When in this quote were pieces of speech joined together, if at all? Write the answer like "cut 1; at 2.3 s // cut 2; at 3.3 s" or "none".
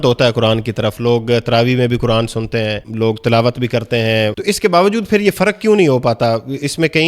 cut 1; at 2.9 s // cut 2; at 4.4 s